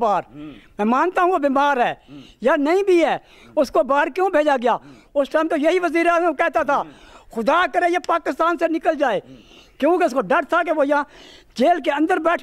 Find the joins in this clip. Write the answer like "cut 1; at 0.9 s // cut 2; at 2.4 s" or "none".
none